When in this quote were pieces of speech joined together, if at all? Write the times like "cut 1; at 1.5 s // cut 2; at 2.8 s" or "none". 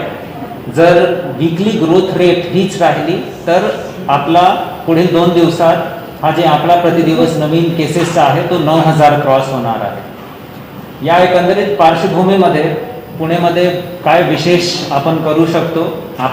none